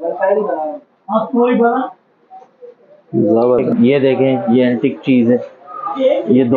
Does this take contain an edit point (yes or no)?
yes